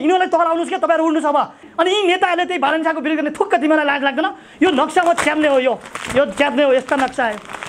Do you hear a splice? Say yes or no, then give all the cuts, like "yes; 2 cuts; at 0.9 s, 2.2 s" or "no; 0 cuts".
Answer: yes; 1 cut; at 1.6 s